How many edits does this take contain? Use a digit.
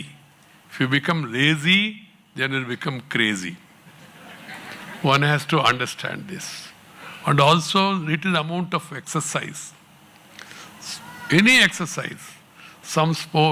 0